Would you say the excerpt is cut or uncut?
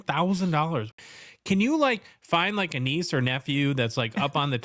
cut